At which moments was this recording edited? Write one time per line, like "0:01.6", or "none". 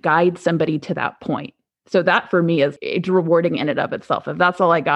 0:02.8